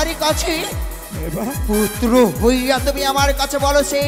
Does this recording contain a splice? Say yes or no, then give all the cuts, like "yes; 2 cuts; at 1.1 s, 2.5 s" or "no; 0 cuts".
no; 0 cuts